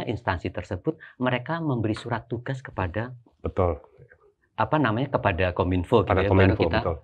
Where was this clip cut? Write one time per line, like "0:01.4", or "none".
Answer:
none